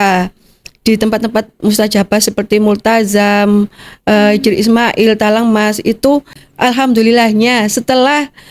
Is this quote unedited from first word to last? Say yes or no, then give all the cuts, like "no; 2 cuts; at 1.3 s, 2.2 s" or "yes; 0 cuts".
no; 1 cut; at 6.4 s